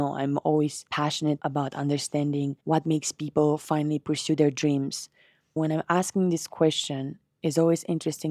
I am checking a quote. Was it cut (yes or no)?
yes